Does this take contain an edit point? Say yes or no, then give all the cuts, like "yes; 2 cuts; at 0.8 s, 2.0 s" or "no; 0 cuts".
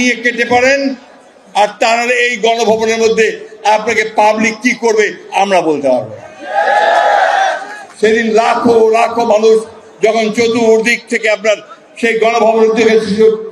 no; 0 cuts